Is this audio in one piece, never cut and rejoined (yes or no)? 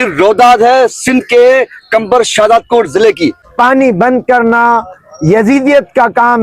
no